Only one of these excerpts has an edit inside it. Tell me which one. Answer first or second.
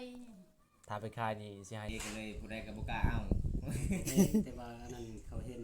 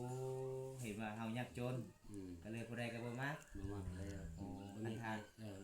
first